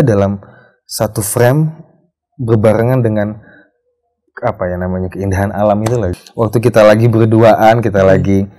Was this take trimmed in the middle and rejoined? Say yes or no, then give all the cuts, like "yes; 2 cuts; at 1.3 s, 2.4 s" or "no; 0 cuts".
yes; 1 cut; at 6.1 s